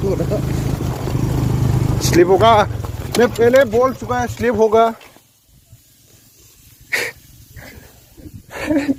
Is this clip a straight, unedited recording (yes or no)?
yes